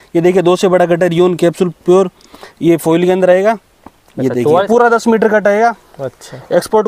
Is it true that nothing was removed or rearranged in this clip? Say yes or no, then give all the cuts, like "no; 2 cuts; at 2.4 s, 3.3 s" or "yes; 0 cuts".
no; 1 cut; at 4.7 s